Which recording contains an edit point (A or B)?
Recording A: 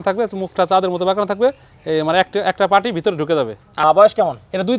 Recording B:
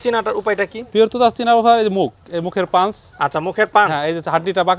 A